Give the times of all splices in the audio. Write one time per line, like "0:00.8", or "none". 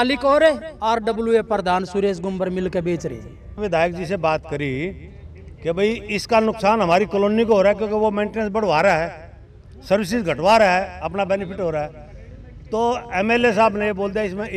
0:03.6